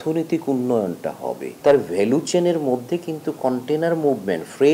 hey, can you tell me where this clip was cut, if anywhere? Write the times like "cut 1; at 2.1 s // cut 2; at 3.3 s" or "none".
cut 1; at 1.5 s